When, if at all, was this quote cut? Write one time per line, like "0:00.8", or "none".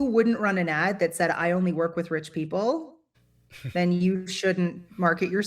none

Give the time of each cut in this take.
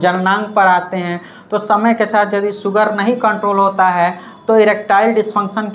none

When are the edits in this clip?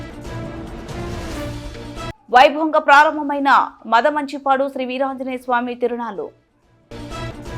0:01.6

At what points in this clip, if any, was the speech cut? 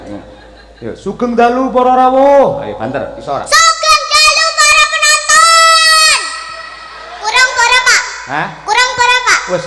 none

